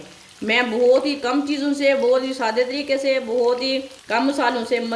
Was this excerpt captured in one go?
no; 1 cut; at 3.9 s

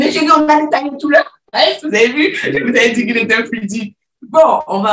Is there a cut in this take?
no; 0 cuts

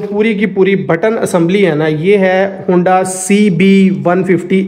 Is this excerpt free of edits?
yes; 0 cuts

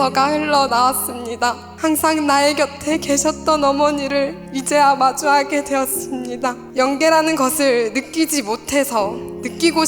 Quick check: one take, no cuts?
no; 3 cuts; at 1.7 s, 4.5 s, 6.6 s

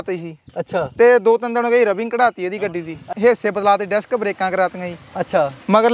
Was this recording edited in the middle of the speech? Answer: yes; 1 cut; at 3.1 s

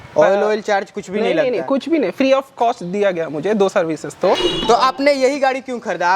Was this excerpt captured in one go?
no; 1 cut; at 4.5 s

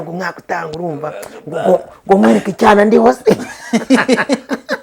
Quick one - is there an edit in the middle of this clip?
no; 0 cuts

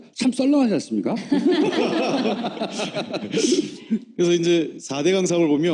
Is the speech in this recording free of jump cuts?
no; 1 cut; at 1.1 s

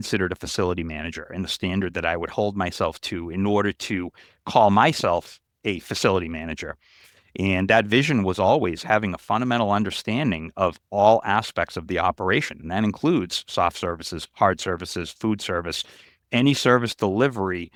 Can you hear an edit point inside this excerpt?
no; 0 cuts

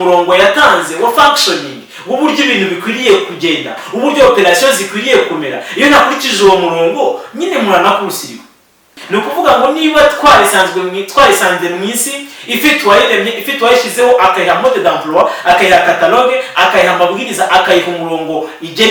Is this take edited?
yes; 1 cut; at 8.9 s

